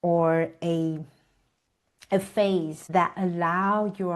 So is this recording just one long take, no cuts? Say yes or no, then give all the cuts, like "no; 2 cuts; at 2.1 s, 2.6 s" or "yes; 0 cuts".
no; 1 cut; at 2.8 s